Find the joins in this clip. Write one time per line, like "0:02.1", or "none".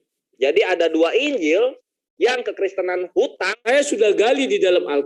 0:03.7